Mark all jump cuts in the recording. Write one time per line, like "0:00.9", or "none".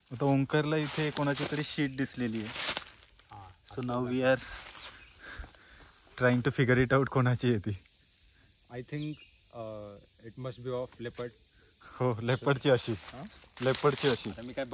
none